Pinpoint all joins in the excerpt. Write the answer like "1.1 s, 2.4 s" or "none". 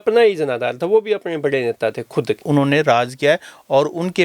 2.4 s